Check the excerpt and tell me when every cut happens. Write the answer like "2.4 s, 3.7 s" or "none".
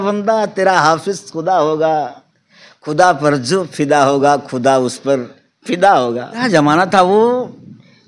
6.3 s

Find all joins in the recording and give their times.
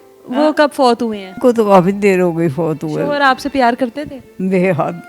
1.4 s

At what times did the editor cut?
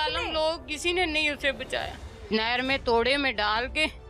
2.2 s

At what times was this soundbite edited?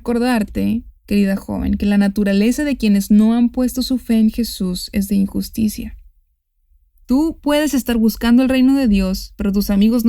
0.9 s

